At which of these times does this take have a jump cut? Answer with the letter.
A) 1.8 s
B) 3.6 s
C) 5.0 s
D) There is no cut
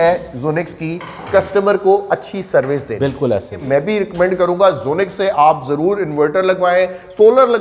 B